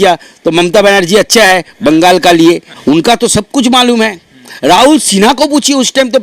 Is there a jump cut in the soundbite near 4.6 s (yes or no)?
no